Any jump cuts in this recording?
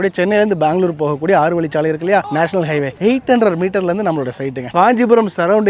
yes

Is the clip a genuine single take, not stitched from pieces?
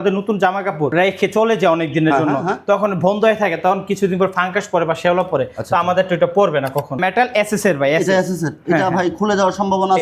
no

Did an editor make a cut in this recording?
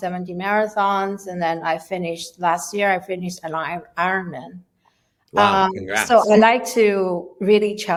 no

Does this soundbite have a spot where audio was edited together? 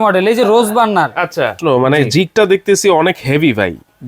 yes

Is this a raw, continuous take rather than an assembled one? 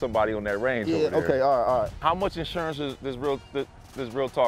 no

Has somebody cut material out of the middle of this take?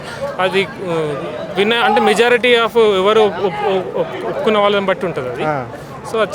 no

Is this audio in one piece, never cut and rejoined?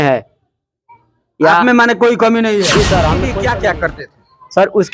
no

